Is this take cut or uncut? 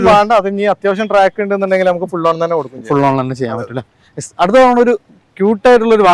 uncut